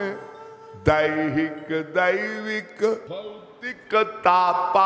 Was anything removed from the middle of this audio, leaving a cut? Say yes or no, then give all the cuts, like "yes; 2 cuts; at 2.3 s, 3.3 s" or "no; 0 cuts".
yes; 1 cut; at 3.1 s